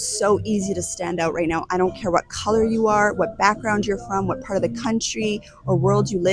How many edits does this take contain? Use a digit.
0